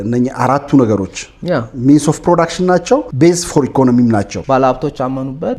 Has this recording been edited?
yes; 2 cuts; at 3.1 s, 4.4 s

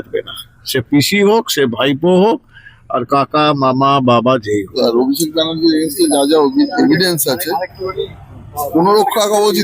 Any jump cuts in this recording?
yes; 1 cut; at 4.7 s

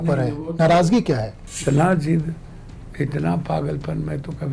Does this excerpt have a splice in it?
yes; 1 cut; at 1.6 s

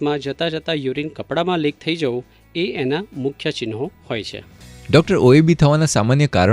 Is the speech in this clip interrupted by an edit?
yes; 1 cut; at 4.6 s

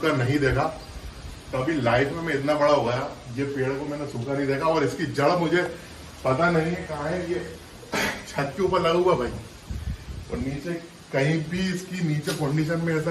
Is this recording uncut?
yes; 0 cuts

